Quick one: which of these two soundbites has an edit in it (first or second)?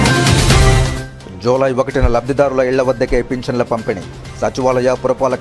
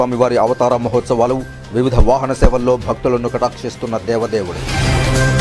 first